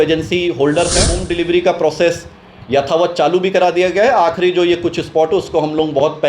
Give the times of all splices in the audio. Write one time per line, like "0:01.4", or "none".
0:01.2